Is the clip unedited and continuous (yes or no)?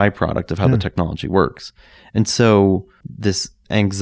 no